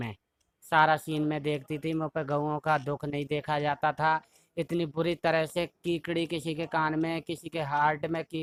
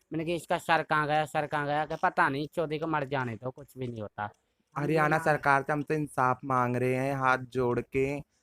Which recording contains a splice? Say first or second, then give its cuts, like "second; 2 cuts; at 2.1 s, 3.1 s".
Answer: second; 1 cut; at 4.7 s